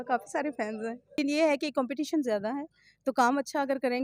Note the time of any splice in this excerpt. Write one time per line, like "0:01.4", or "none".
0:01.2